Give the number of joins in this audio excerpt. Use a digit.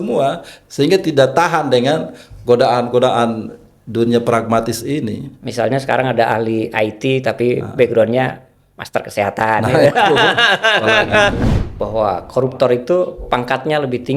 1